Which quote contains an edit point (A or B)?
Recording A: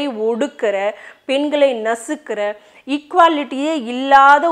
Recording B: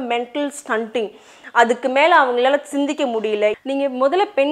B